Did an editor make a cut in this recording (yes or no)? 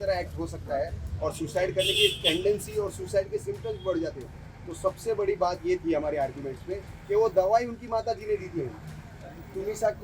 no